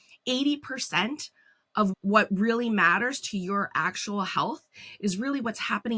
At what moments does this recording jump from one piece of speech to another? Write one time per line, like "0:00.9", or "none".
0:01.9